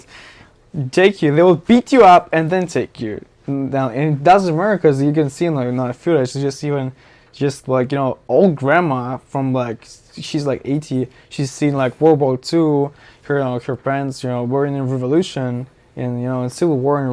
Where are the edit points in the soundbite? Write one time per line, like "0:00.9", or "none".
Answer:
none